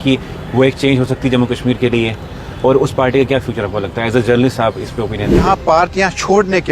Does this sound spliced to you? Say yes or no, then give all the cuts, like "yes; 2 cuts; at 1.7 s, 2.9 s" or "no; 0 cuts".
yes; 1 cut; at 5.4 s